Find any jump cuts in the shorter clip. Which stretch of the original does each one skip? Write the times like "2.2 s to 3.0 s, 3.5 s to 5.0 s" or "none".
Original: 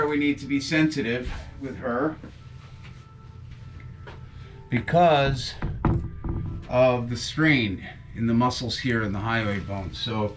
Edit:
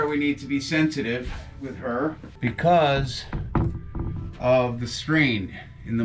2.3 s to 4.6 s